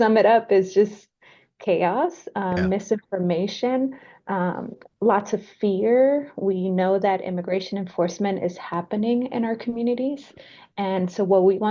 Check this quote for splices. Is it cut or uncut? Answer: uncut